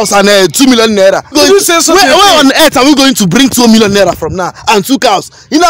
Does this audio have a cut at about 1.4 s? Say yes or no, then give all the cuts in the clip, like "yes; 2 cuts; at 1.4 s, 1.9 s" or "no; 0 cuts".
yes; 1 cut; at 1.4 s